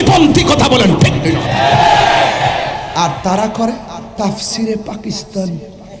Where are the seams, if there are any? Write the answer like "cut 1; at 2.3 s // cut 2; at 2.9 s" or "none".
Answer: cut 1; at 2.5 s